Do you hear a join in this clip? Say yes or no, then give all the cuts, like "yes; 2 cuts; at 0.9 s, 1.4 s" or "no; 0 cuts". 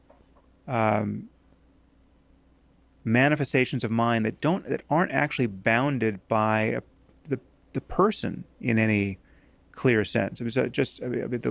yes; 2 cuts; at 4.4 s, 10.2 s